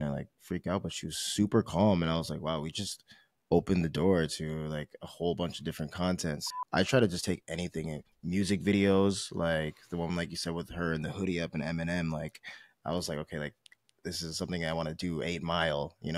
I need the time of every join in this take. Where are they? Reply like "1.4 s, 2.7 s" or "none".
6.4 s